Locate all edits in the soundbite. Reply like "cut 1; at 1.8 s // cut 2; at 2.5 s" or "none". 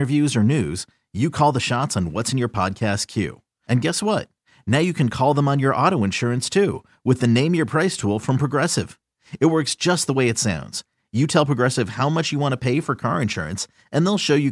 none